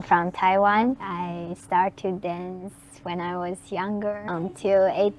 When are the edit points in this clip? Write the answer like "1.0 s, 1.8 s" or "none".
1.1 s, 4.2 s